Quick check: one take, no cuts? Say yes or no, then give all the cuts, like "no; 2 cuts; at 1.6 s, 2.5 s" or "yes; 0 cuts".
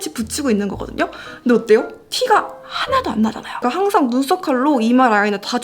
no; 1 cut; at 3.6 s